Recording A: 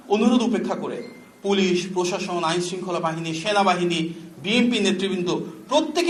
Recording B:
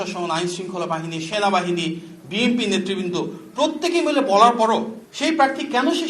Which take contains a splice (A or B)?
B